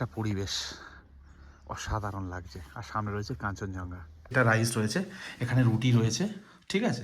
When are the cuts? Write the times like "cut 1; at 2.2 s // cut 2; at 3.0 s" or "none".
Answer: cut 1; at 4.3 s